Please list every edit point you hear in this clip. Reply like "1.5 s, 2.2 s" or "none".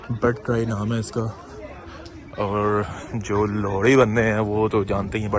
none